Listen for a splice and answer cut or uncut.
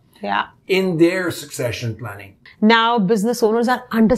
cut